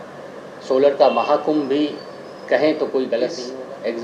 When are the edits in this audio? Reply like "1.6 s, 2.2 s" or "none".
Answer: 3.1 s